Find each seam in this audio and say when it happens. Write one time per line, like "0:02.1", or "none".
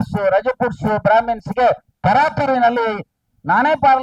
none